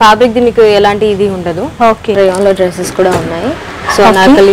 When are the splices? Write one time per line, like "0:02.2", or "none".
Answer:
0:02.1